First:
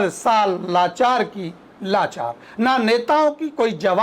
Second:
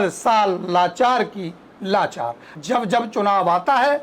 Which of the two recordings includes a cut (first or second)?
second